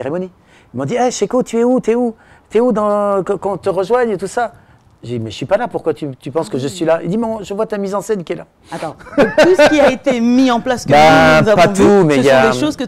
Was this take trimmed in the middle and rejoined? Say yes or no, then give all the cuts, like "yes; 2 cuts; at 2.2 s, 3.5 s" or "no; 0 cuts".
no; 0 cuts